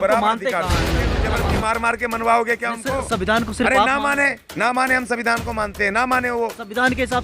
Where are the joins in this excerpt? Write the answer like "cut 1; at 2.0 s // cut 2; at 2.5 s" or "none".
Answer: cut 1; at 1.2 s